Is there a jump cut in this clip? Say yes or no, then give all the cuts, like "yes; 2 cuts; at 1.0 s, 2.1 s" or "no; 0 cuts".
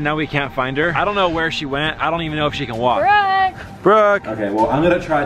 yes; 3 cuts; at 0.9 s, 3.0 s, 4.3 s